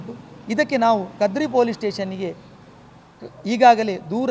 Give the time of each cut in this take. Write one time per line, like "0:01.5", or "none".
none

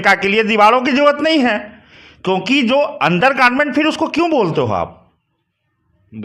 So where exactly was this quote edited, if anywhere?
none

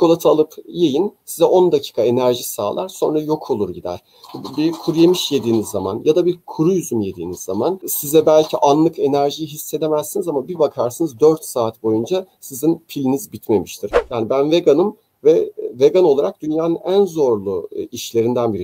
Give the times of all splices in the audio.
0:14.0

